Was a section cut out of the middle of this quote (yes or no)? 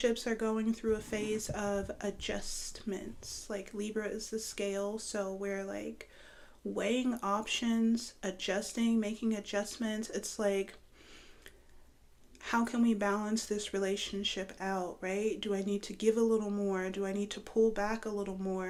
no